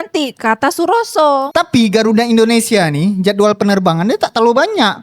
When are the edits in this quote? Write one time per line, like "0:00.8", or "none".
0:01.5